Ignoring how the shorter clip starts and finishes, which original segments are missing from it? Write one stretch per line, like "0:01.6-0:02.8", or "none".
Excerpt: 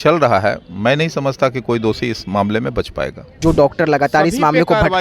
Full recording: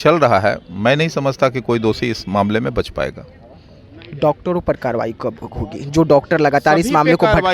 0:03.2-0:05.8